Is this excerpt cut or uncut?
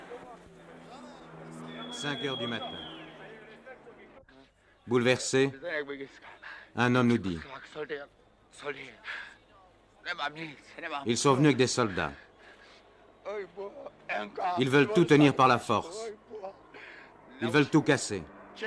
uncut